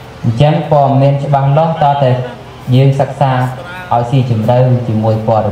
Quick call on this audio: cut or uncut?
uncut